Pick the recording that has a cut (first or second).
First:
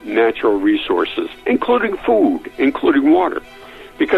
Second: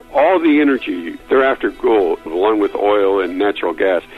second